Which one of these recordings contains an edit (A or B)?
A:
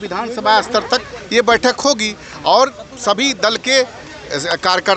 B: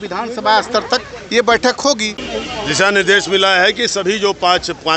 B